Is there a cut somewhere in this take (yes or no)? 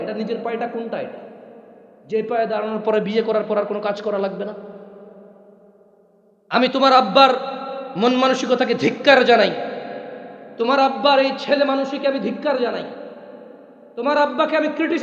no